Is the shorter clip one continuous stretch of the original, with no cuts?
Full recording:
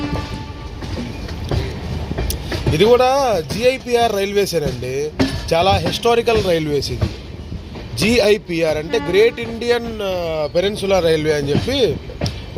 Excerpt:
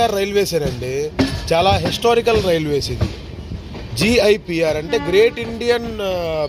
yes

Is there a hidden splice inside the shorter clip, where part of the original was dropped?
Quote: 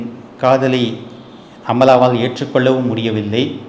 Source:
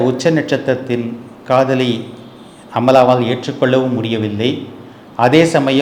no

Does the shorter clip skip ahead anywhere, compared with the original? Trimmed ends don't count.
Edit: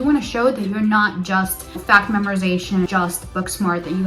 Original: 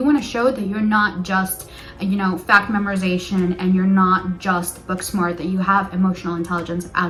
yes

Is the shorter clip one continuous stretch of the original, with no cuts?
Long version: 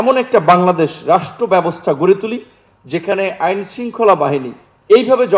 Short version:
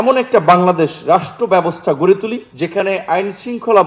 no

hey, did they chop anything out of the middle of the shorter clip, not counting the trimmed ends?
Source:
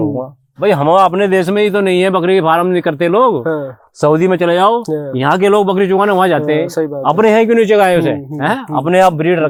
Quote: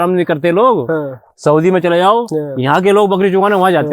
no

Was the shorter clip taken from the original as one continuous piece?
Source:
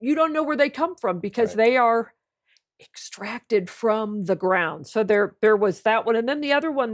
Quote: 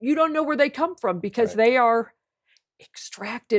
yes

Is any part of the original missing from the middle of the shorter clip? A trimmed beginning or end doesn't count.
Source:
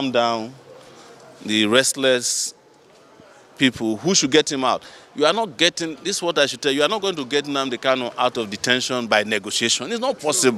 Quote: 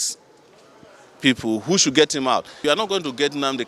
yes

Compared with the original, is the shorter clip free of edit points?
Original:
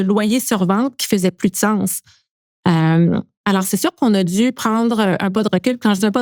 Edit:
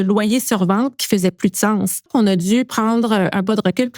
no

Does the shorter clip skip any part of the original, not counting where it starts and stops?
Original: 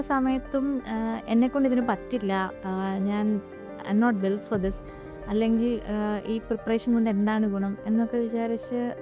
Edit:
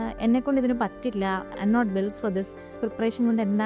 yes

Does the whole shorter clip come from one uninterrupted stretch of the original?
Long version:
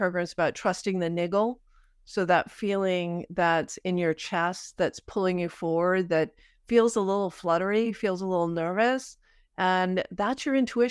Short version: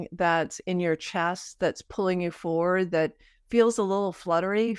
yes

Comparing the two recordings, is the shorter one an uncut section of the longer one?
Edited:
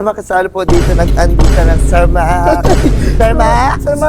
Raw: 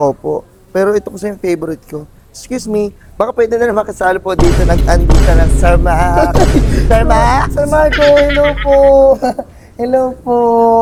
yes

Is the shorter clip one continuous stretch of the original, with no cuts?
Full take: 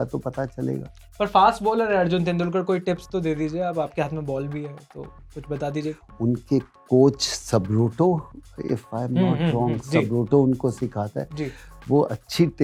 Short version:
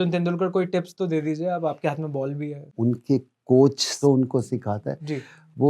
no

